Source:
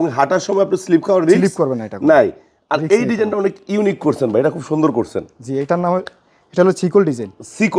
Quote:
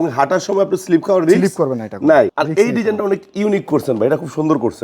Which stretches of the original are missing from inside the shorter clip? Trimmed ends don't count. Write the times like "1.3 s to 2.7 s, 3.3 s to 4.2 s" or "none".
2.3 s to 2.7 s